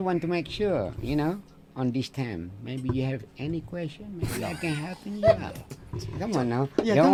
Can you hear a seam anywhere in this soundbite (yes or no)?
no